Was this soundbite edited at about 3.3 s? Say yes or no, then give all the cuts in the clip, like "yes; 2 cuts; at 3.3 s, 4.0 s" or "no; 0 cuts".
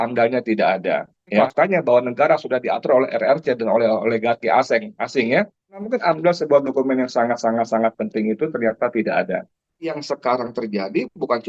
no; 3 cuts; at 1.4 s, 5.8 s, 10.0 s